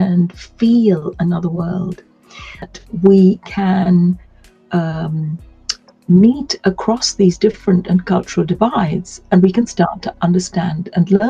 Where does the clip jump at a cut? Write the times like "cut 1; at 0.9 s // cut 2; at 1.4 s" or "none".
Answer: cut 1; at 2.7 s